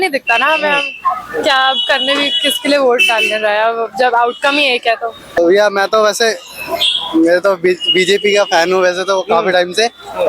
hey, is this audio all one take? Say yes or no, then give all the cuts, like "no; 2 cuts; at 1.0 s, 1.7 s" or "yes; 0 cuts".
no; 1 cut; at 5.4 s